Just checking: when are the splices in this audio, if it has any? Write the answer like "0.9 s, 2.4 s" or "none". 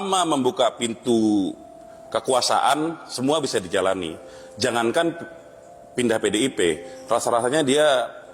none